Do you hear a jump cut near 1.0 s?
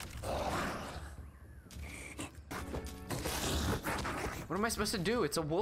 no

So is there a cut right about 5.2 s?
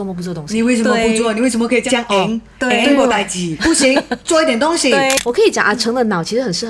yes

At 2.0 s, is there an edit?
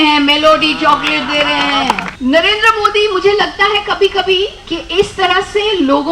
yes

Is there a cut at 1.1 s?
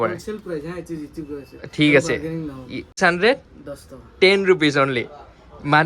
no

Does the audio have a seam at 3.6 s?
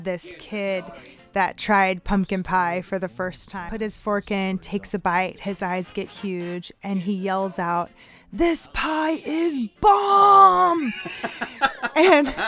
yes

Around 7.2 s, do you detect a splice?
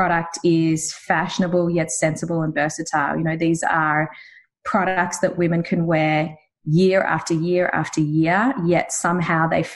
no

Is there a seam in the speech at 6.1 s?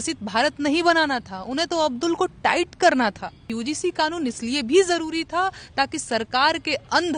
no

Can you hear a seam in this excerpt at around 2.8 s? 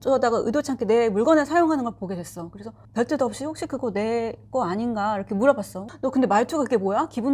yes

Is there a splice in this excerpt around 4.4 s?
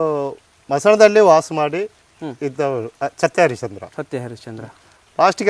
no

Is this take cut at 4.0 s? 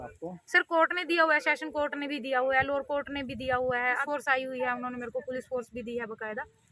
yes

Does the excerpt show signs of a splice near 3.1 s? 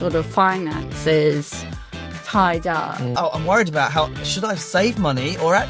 yes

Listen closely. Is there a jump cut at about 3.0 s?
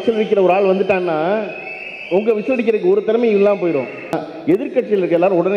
no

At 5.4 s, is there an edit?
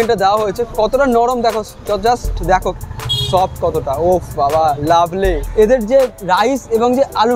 yes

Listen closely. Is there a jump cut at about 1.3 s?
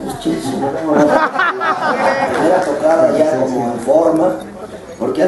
no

